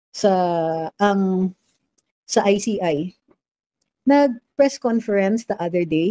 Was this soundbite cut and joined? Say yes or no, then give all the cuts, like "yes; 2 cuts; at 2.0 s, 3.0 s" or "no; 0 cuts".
no; 0 cuts